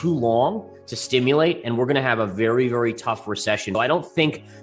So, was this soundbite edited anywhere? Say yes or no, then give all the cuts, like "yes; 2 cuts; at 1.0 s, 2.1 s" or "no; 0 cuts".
yes; 1 cut; at 3.7 s